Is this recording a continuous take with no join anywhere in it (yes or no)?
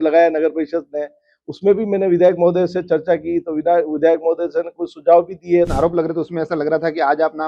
no